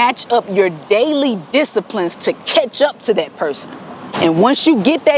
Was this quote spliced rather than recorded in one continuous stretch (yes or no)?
yes